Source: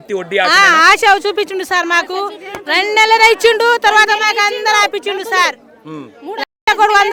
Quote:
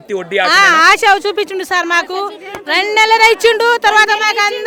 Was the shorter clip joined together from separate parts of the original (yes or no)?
no